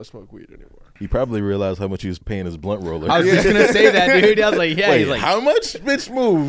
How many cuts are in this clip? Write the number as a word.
two